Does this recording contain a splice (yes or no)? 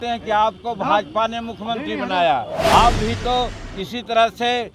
yes